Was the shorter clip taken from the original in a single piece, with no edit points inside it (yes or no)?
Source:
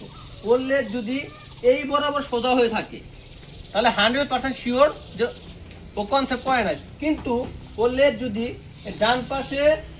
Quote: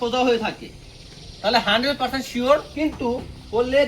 no